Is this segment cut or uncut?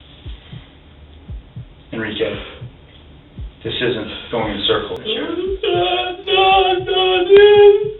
cut